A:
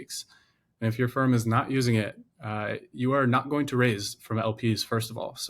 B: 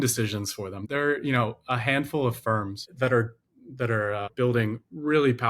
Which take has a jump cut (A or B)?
B